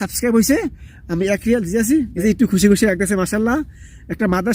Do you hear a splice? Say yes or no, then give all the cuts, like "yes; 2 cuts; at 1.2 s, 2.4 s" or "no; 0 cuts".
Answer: yes; 1 cut; at 2.1 s